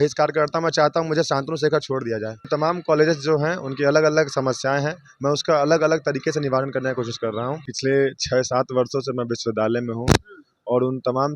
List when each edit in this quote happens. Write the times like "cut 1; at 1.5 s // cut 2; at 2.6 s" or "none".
cut 1; at 2.5 s // cut 2; at 7.7 s